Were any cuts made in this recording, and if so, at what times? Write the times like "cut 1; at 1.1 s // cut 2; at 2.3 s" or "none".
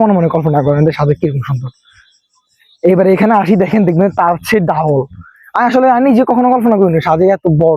none